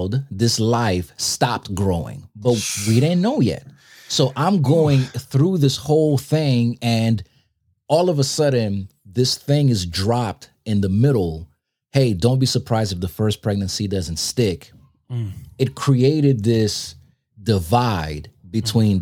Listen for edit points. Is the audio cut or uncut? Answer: uncut